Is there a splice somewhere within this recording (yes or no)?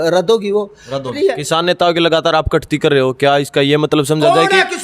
yes